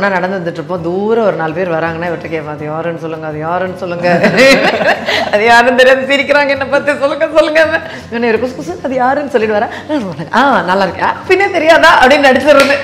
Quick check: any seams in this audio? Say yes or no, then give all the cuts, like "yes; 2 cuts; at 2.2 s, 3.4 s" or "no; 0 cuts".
no; 0 cuts